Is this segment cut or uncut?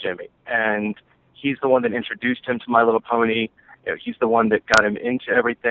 cut